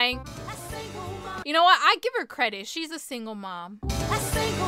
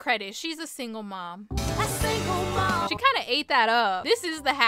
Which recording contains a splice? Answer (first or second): first